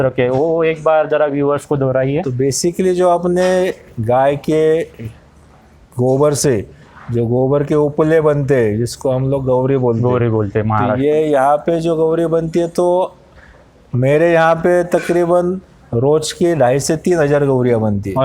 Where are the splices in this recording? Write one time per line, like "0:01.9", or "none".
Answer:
none